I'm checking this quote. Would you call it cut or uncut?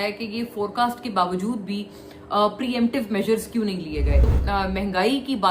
cut